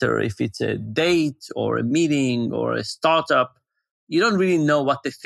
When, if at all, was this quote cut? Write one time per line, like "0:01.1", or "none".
none